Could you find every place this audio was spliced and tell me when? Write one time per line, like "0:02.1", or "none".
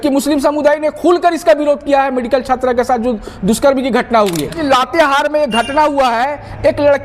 0:04.6